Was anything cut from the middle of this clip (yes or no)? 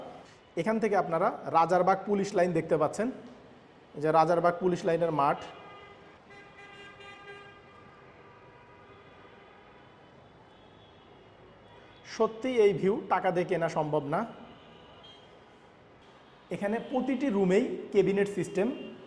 yes